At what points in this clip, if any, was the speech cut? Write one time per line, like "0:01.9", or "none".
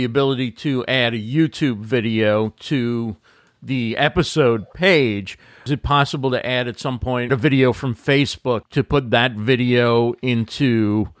0:05.7
0:07.3
0:08.7